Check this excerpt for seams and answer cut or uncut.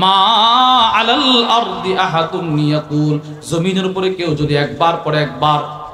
uncut